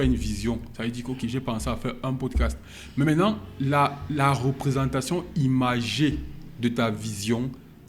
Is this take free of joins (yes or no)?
yes